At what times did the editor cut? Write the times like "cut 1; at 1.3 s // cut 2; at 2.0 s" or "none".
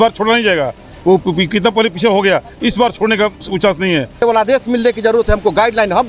cut 1; at 4.2 s